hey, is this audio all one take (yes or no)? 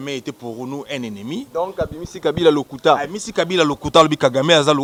yes